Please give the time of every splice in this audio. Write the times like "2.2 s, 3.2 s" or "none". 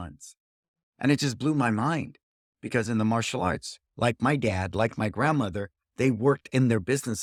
none